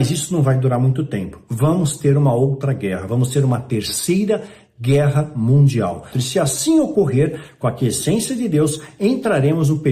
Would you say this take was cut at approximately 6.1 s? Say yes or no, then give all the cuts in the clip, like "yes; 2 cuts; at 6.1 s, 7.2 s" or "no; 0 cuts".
yes; 1 cut; at 6.1 s